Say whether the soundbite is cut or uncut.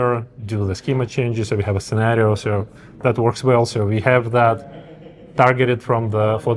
uncut